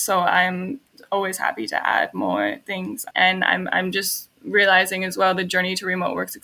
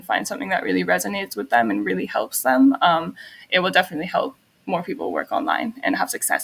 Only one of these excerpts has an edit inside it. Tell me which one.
first; 1 cut; at 3.0 s

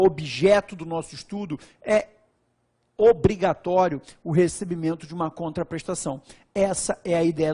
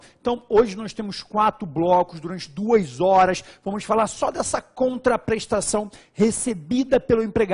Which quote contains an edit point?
second; 1 cut; at 2.2 s

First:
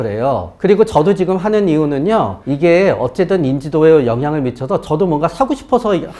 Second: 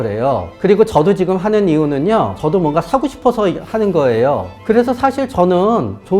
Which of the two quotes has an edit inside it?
second; 2 cuts; at 2.4 s, 4.5 s

